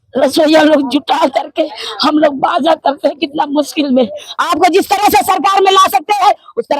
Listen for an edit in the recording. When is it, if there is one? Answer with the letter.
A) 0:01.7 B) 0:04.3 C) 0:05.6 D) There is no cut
B